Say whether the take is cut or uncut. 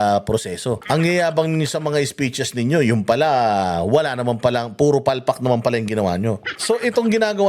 cut